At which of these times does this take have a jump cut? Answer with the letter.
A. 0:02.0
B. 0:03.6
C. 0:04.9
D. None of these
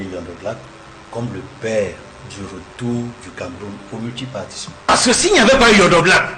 C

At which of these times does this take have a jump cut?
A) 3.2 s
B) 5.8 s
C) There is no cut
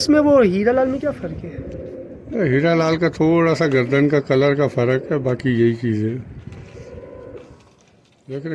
C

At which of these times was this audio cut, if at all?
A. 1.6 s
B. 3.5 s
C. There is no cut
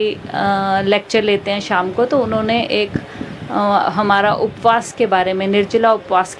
C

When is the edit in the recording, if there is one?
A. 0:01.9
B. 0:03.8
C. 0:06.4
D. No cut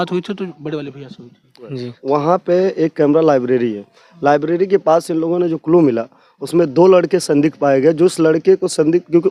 A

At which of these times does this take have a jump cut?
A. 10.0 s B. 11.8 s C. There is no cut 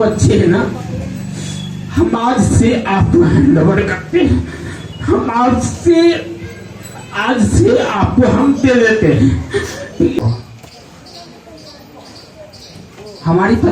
A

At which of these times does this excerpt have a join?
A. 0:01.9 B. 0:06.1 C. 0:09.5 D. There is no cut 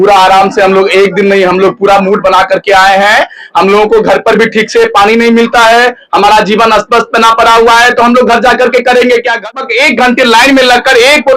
C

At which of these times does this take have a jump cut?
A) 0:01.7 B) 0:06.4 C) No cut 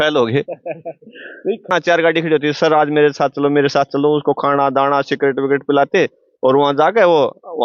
A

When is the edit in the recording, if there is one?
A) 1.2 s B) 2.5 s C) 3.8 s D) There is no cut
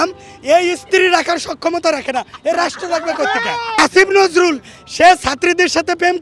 C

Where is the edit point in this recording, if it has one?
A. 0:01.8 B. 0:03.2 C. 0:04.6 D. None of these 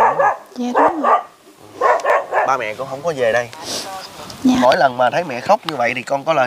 C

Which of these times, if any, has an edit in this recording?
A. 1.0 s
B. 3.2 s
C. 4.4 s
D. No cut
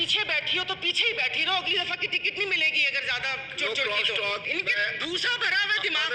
C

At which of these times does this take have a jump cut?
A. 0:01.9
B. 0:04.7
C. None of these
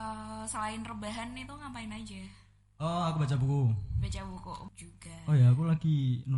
B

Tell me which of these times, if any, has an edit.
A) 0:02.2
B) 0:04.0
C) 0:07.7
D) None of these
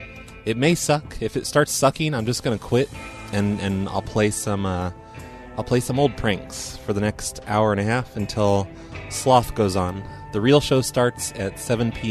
B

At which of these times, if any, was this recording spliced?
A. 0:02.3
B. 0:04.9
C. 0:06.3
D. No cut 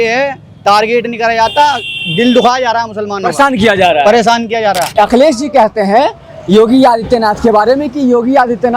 B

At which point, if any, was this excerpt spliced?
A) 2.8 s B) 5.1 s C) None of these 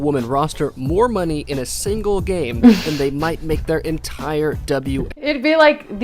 B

